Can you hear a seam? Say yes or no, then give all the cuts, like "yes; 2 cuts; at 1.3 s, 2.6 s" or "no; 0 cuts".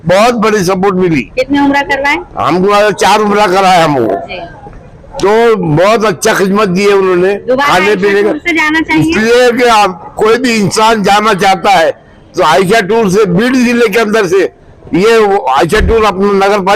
no; 0 cuts